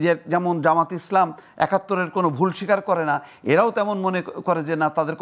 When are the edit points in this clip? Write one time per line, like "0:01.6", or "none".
none